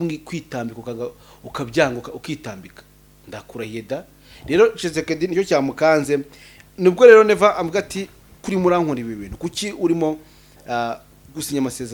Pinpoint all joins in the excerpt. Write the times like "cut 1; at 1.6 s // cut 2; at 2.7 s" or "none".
none